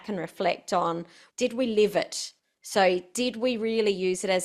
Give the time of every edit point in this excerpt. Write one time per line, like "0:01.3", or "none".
0:01.1